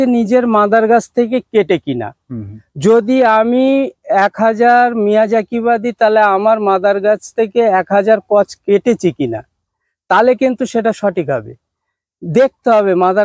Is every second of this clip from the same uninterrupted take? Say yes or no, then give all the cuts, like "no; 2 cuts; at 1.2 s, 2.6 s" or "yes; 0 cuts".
yes; 0 cuts